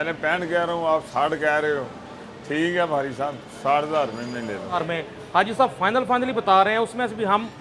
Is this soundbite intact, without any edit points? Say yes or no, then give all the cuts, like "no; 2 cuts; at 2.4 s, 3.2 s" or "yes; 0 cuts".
no; 1 cut; at 4.8 s